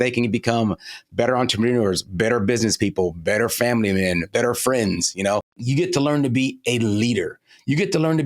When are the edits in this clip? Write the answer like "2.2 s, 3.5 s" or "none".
4.3 s, 5.6 s